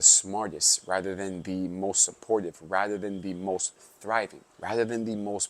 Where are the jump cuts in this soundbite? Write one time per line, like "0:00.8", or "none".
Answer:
0:04.5

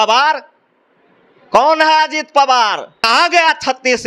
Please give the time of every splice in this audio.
0:03.0

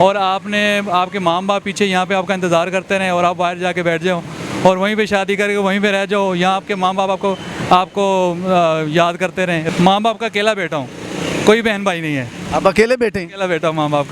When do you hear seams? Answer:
0:09.6

